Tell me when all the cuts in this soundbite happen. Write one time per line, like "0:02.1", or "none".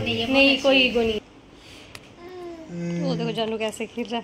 0:01.2